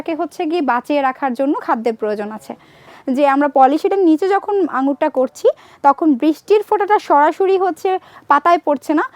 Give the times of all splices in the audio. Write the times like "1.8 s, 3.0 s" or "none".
2.9 s